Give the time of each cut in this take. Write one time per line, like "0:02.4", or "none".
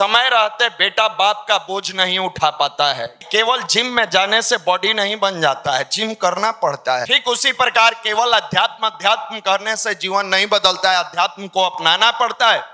0:03.2
0:07.1